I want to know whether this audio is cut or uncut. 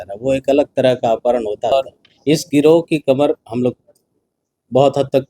cut